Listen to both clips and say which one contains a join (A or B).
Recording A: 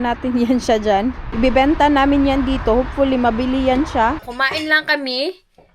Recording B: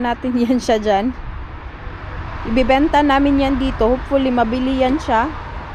A